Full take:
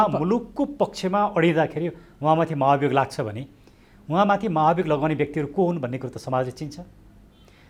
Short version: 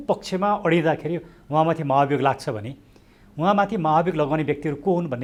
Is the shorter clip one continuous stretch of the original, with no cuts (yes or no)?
yes